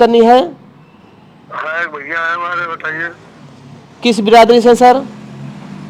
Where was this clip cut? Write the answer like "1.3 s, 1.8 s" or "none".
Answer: none